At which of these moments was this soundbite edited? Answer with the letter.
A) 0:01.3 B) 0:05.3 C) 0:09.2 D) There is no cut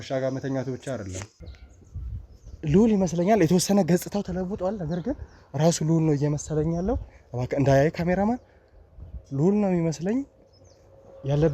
A